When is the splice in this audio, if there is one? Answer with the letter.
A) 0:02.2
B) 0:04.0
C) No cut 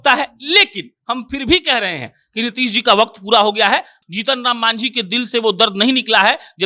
B